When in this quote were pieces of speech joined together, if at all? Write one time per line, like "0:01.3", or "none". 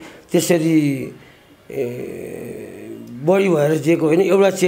none